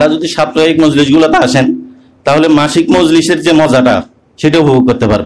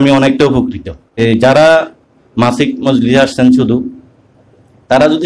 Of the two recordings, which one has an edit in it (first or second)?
second